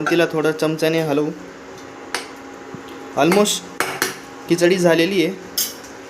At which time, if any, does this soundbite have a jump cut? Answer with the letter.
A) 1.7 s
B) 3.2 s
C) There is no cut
A